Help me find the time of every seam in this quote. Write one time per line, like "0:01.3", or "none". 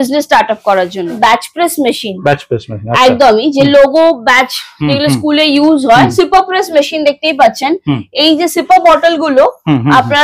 0:01.2
0:06.1